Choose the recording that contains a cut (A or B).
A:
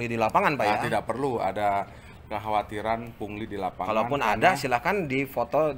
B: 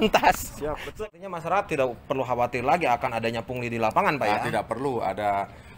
B